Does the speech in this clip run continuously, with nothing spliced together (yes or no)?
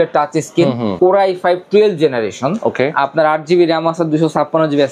no